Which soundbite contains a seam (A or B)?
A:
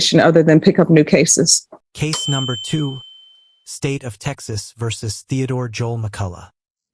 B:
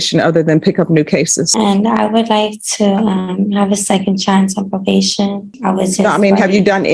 B